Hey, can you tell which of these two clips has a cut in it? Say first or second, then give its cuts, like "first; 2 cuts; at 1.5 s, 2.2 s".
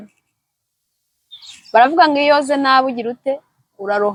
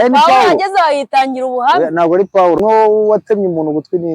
second; 1 cut; at 2.6 s